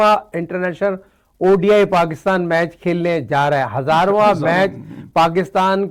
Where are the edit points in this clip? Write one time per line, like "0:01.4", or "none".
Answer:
none